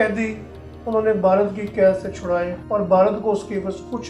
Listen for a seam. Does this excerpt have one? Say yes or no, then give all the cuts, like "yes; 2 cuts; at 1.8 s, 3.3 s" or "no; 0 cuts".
yes; 1 cut; at 2.6 s